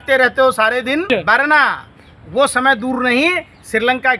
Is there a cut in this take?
yes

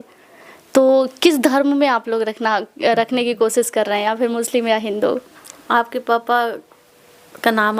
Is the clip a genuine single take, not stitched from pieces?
yes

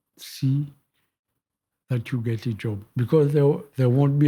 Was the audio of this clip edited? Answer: yes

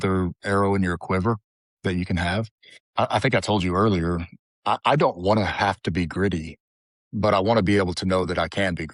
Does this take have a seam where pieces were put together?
no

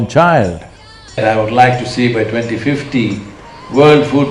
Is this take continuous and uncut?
no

